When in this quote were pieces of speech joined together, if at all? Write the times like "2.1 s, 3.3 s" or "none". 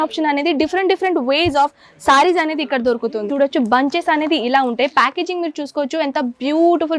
3.3 s